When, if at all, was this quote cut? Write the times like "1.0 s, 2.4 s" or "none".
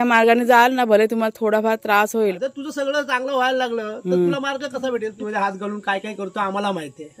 2.4 s, 5.2 s